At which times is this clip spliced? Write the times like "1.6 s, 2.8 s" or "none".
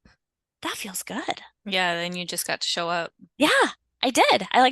none